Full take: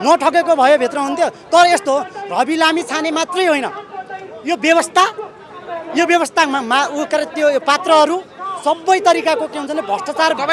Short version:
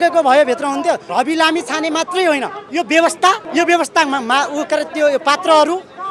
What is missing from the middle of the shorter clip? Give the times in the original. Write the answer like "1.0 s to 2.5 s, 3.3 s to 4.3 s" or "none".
1.4 s to 2.3 s, 3.8 s to 4.3 s, 5.2 s to 5.9 s